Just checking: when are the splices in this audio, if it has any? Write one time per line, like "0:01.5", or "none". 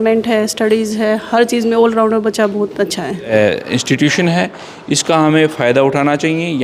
0:03.3